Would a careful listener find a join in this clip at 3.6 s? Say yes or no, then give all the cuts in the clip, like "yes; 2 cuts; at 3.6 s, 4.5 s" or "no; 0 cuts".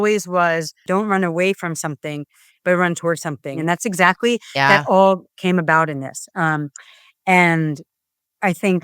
yes; 2 cuts; at 0.8 s, 3.6 s